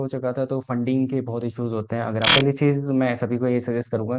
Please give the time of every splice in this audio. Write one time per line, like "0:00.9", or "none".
0:02.4